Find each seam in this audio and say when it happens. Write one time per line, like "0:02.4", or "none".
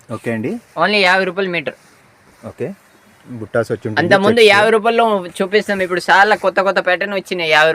none